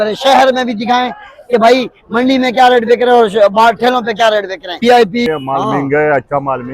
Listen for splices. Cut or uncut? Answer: cut